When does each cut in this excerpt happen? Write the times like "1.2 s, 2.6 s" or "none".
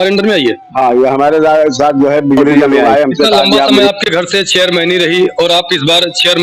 3.9 s

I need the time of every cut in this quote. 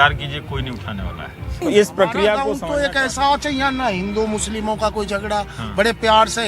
2.6 s

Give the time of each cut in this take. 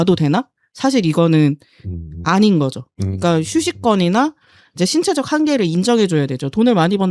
none

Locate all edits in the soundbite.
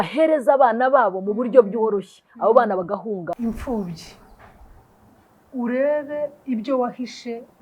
3.3 s

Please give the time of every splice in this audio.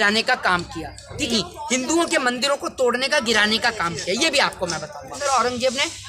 1.3 s, 5.2 s

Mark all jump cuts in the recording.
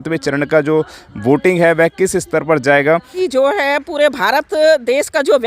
3.1 s

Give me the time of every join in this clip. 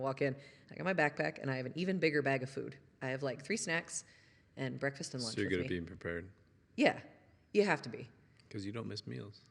none

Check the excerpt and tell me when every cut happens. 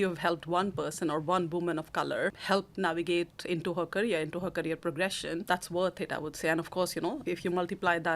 2.4 s, 5.4 s, 7.2 s

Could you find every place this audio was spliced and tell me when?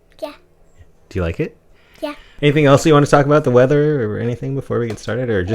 2.3 s

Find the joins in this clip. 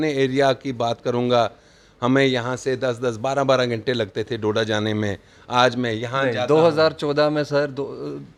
none

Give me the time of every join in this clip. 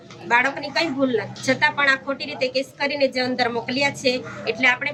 none

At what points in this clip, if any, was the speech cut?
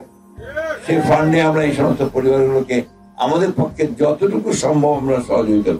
none

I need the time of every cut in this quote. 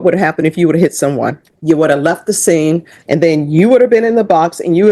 1.5 s, 2.9 s

